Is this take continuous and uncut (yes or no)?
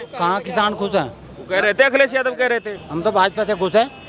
no